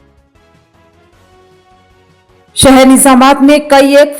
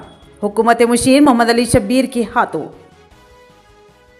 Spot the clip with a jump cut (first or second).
first